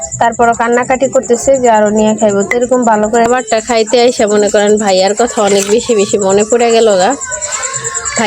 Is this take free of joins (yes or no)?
no